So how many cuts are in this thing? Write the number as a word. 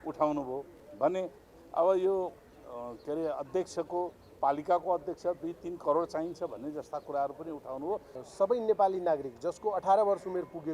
one